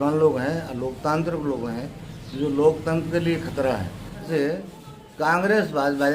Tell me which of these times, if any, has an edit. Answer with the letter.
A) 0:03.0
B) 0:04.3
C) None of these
B